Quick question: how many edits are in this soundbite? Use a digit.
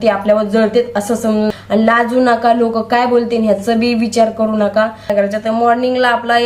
2